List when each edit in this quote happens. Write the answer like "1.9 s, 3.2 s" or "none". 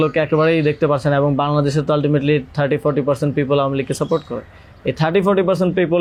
none